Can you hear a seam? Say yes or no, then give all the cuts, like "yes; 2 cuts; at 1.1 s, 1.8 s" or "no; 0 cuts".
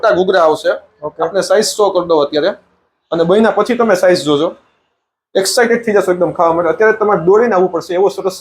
no; 0 cuts